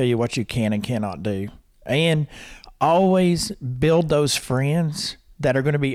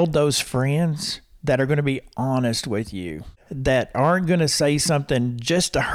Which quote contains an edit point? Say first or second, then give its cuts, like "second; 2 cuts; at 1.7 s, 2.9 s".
second; 1 cut; at 3.5 s